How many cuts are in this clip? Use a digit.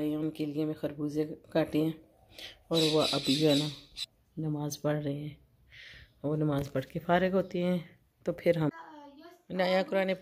0